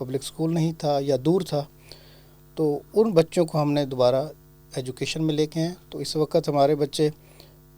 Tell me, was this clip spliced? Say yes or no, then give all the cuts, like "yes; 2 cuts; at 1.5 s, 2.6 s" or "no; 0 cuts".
no; 0 cuts